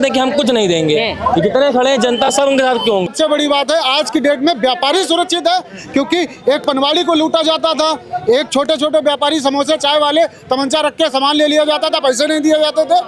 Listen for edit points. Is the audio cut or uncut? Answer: cut